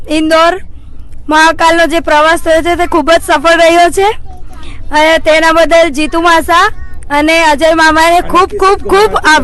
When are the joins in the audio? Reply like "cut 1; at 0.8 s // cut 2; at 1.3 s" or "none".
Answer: none

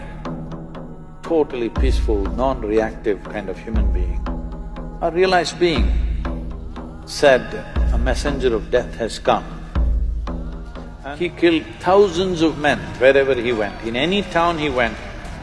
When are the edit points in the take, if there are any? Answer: cut 1; at 10.9 s

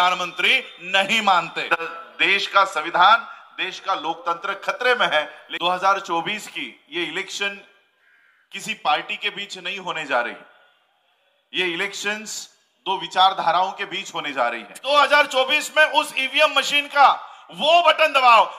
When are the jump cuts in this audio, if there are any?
cut 1; at 1.7 s // cut 2; at 5.4 s // cut 3; at 14.7 s

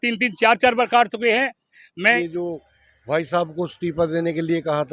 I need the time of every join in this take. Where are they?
cut 1; at 2.2 s

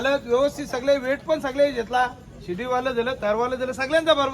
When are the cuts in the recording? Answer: none

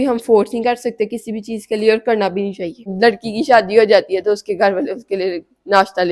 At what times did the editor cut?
cut 1; at 2.9 s

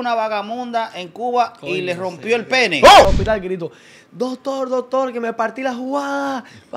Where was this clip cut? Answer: cut 1; at 3.1 s

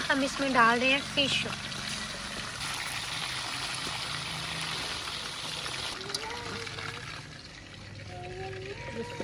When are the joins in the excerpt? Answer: none

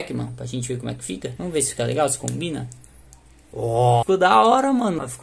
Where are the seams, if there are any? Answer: cut 1; at 1.4 s // cut 2; at 4.0 s

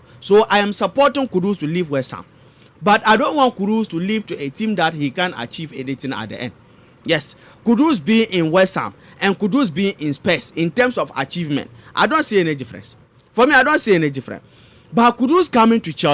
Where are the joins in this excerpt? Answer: none

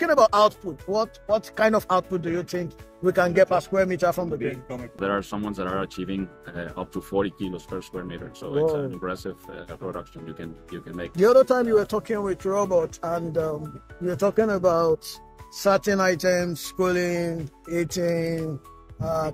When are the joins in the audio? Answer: cut 1; at 5.0 s // cut 2; at 11.1 s

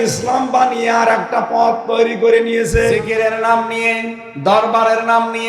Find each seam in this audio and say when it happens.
cut 1; at 3.0 s

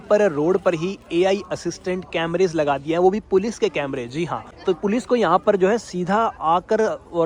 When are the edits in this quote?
none

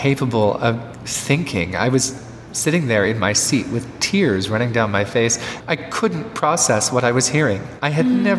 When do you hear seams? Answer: cut 1; at 5.5 s

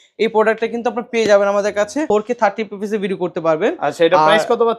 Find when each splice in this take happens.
cut 1; at 2.1 s

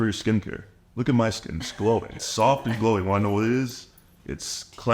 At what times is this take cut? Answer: cut 1; at 2.2 s

